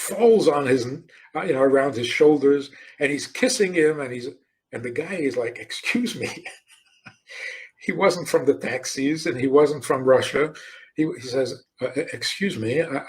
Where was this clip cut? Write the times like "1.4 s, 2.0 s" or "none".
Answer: 11.6 s